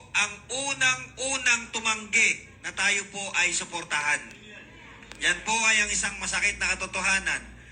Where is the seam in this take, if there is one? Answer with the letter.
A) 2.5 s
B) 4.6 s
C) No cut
C